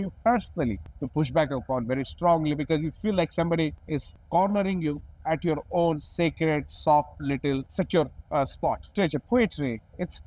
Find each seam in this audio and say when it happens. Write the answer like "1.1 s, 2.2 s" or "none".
0.9 s, 3.9 s, 7.7 s, 8.9 s